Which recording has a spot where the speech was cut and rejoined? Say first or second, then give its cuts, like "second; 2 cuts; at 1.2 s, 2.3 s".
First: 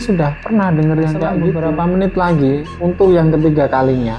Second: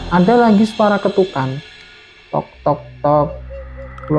first; 1 cut; at 1.6 s